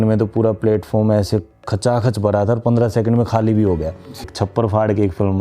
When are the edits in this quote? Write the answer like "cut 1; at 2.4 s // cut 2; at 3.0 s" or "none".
cut 1; at 4.3 s